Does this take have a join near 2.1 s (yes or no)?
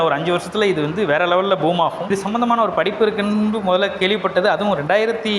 yes